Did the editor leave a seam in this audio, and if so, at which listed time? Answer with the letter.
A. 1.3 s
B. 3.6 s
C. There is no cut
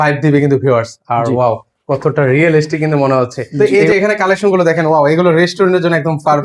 B